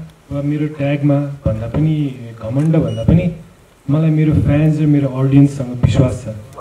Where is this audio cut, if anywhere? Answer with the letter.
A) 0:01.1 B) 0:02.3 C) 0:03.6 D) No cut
D